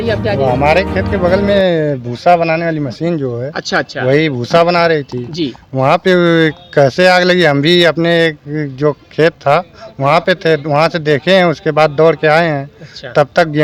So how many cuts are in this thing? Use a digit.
0